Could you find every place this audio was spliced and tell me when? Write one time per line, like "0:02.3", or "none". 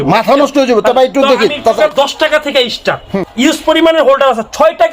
0:01.8
0:03.1